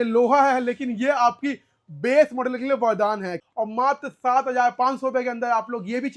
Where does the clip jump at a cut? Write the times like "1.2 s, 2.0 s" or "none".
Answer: 3.4 s